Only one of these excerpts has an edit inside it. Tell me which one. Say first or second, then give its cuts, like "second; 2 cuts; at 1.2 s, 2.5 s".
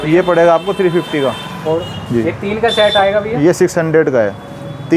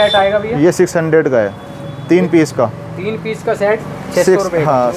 first; 1 cut; at 1.6 s